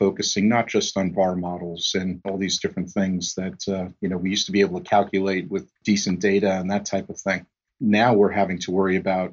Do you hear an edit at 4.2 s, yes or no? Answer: no